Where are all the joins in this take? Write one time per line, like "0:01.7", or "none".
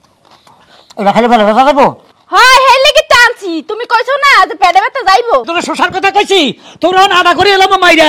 0:05.5